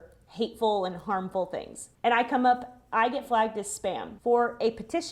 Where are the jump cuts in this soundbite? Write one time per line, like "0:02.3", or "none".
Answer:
0:01.9
0:04.1